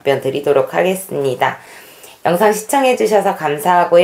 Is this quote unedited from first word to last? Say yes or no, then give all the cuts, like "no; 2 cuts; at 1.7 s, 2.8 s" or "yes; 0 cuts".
yes; 0 cuts